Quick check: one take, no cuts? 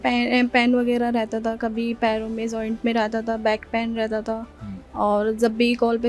yes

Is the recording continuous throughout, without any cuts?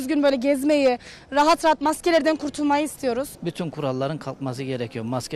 no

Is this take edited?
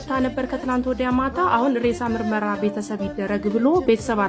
no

